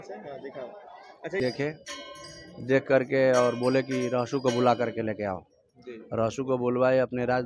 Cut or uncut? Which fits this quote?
cut